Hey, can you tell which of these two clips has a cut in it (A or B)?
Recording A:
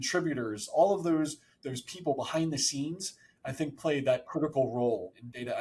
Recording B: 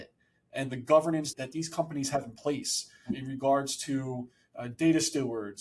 B